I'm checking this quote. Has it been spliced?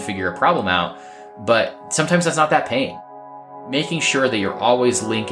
yes; 2 cuts; at 1.8 s, 3.5 s

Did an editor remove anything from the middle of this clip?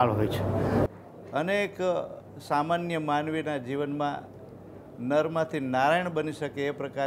yes; 1 cut; at 0.9 s

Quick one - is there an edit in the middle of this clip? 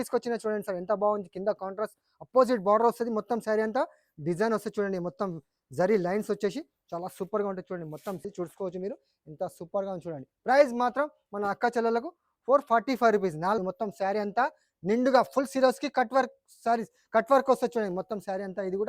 yes; 2 cuts; at 8.2 s, 13.6 s

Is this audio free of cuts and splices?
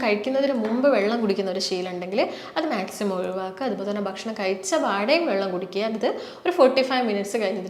yes; 0 cuts

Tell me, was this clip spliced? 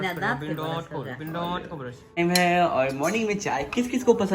yes; 1 cut; at 2.2 s

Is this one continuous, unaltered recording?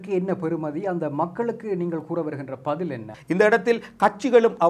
no; 1 cut; at 3.1 s

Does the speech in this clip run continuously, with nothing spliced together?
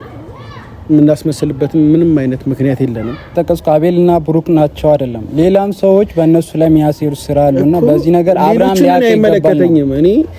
no; 1 cut; at 3.3 s

